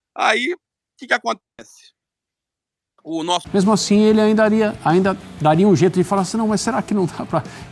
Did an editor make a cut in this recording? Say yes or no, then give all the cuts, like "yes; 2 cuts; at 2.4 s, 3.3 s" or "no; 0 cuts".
yes; 1 cut; at 3.4 s